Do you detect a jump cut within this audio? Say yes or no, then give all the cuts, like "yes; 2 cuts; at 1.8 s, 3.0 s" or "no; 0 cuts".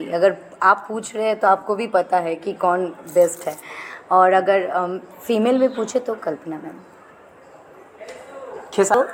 no; 0 cuts